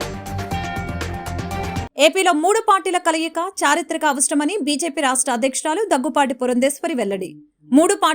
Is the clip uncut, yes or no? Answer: no